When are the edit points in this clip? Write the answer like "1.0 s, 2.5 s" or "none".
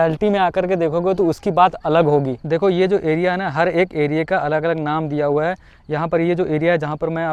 none